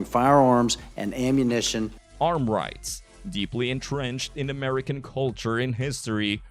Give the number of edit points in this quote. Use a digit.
0